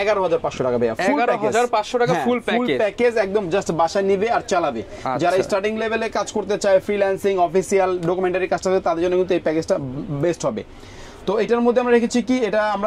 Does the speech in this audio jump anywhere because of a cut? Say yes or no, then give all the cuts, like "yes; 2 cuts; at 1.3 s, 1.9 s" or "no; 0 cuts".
no; 0 cuts